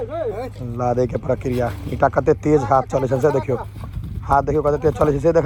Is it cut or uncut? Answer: uncut